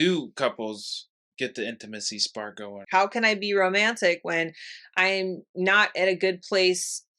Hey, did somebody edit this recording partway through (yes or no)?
yes